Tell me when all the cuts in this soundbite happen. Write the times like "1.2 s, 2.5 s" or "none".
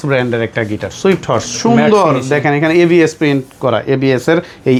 none